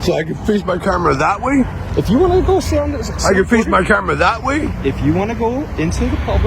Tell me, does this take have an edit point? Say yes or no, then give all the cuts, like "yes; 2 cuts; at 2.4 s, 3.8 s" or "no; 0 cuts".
no; 0 cuts